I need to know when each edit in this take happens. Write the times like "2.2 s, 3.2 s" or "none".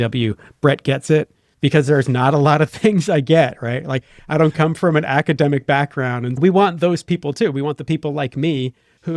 none